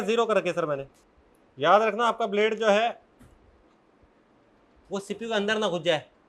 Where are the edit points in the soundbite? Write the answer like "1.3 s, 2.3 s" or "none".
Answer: 1.1 s